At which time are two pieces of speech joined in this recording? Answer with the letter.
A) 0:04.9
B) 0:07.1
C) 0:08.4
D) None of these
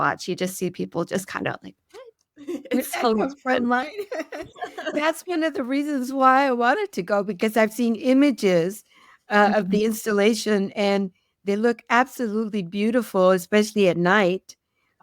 A